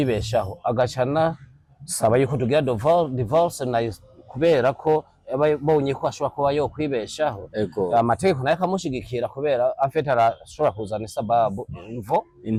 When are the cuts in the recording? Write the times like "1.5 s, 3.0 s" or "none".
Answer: none